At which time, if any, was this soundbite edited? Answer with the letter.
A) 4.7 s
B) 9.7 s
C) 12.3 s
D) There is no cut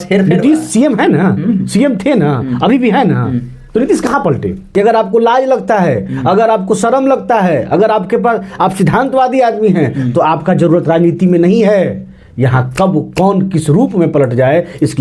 A